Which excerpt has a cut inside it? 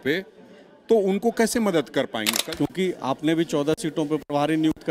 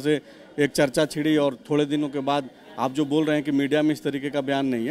first; 1 cut; at 2.3 s

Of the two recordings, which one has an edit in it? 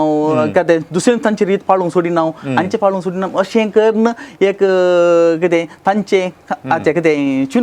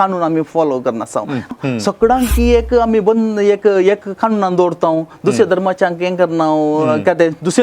second; 1 cut; at 1.4 s

